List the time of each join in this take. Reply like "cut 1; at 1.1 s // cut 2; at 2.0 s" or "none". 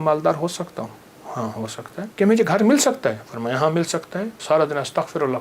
cut 1; at 2.1 s // cut 2; at 4.3 s